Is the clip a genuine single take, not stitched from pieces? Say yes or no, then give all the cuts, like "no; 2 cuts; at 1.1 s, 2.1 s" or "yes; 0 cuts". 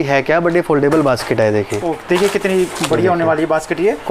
yes; 0 cuts